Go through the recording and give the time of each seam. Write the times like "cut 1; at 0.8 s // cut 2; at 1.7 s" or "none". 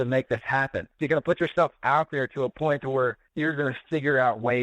cut 1; at 0.9 s